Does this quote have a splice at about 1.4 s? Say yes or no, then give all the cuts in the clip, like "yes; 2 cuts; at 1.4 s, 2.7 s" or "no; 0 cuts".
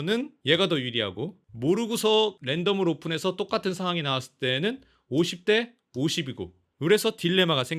no; 0 cuts